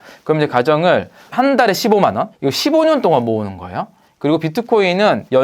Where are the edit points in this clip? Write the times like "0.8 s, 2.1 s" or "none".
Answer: 2.3 s